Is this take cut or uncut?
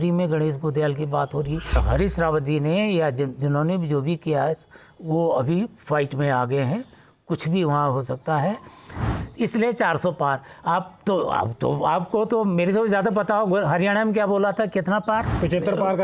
cut